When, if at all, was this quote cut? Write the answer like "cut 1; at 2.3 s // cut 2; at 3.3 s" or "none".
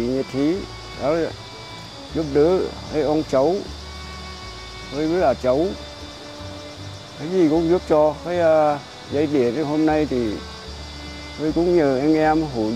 none